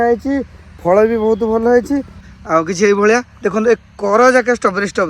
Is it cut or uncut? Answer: cut